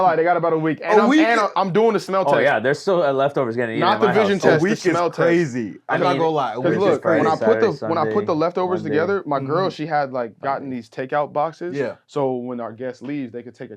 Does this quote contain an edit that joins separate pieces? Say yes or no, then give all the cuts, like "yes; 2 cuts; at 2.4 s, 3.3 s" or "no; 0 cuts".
no; 0 cuts